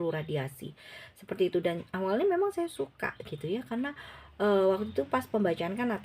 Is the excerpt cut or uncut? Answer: cut